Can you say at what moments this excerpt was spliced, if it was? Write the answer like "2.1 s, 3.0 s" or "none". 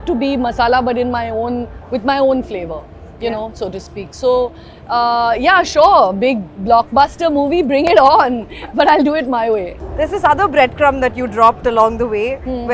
none